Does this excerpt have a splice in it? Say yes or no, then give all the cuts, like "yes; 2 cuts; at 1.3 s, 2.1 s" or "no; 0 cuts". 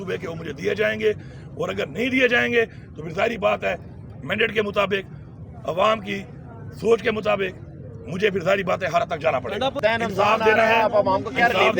yes; 1 cut; at 9.8 s